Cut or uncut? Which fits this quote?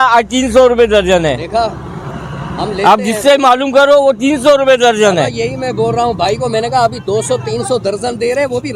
uncut